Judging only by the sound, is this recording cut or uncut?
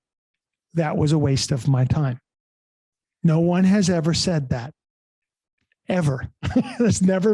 uncut